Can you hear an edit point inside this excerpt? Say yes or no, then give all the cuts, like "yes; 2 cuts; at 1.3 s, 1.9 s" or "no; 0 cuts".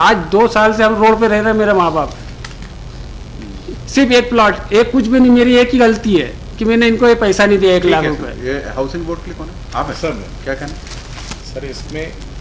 no; 0 cuts